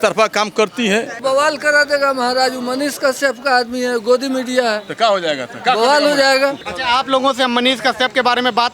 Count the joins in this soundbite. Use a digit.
2